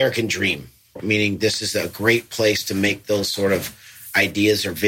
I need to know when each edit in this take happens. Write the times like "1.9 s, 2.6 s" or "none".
1.0 s